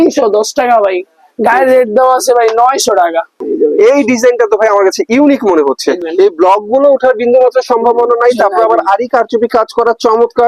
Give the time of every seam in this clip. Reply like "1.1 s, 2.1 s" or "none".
3.4 s, 6.0 s